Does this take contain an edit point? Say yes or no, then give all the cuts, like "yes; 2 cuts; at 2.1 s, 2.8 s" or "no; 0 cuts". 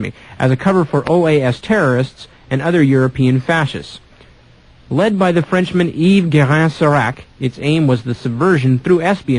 no; 0 cuts